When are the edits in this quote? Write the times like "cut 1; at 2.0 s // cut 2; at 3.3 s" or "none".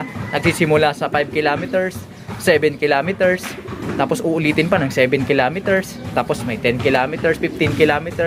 none